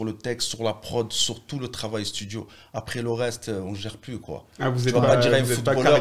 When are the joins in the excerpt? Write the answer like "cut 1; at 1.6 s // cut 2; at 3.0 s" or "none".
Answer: none